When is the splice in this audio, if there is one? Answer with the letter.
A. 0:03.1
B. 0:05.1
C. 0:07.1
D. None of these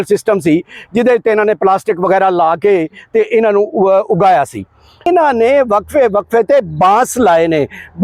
B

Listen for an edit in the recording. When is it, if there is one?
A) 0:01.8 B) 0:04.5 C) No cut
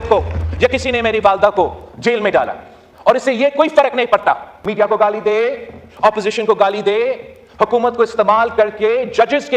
B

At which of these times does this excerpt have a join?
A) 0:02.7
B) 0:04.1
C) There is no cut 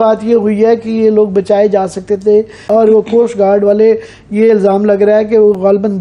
A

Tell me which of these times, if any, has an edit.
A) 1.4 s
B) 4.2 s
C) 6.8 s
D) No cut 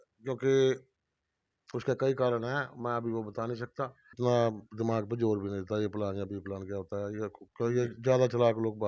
B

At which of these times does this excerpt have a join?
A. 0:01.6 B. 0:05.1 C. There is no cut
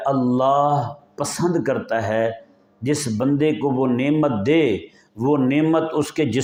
C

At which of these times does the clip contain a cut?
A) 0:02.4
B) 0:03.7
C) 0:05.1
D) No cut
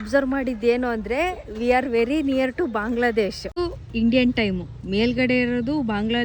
B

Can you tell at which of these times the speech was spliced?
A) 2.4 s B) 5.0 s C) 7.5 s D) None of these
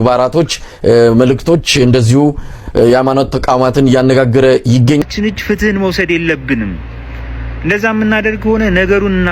B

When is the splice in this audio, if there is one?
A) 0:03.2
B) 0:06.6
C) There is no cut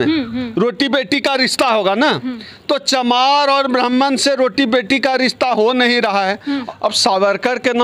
B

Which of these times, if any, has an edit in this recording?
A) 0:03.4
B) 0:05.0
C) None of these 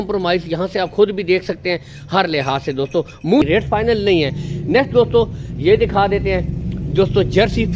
A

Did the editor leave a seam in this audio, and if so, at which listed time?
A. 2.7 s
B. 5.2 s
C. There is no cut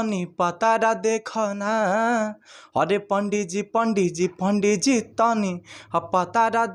C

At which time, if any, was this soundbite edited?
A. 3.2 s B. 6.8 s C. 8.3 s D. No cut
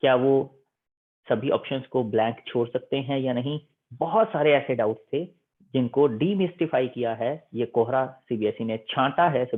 D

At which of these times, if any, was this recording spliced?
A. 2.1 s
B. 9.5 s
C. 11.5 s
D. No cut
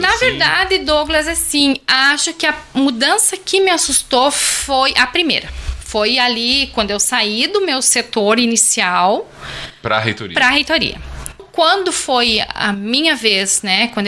C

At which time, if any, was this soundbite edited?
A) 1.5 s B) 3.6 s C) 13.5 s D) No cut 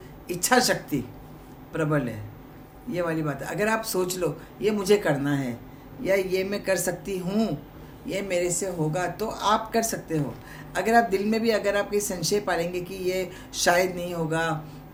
D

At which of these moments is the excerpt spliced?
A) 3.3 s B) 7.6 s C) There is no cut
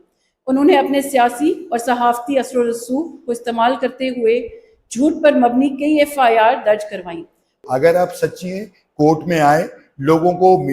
B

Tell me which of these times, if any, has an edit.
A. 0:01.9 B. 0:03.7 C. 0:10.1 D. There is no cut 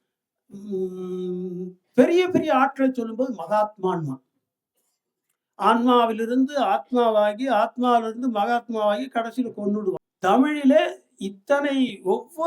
C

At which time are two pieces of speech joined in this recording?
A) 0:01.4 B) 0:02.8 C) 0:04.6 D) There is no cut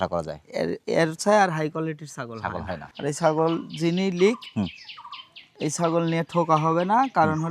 B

